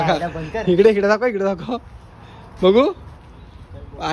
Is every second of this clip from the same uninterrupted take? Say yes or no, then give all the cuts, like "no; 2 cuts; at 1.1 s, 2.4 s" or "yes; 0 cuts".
yes; 0 cuts